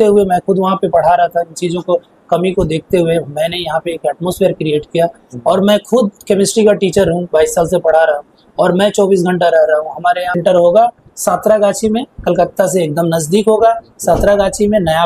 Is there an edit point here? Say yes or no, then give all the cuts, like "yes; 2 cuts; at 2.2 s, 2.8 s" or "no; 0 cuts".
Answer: yes; 1 cut; at 10.4 s